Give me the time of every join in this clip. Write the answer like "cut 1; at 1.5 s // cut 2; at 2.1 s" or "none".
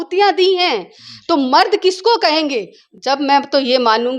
cut 1; at 2.8 s